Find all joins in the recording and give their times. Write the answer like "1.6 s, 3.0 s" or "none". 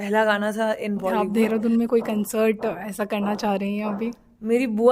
1.1 s